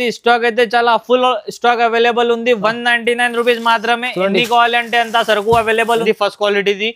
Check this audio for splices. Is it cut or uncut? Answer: cut